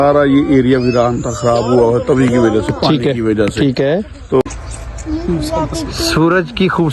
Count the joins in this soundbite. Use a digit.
1